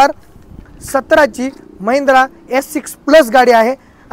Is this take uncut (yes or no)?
yes